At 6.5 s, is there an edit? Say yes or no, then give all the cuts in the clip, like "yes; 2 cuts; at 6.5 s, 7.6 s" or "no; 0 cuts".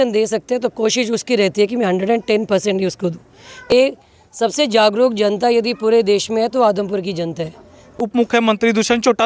no; 2 cuts; at 3.7 s, 8.0 s